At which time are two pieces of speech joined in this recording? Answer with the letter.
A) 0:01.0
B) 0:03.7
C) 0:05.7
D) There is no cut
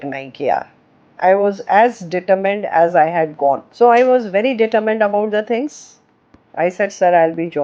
B